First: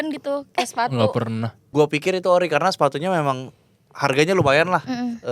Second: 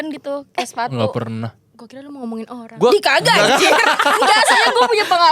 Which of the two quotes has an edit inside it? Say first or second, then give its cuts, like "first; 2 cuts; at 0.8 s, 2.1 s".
first; 1 cut; at 1.6 s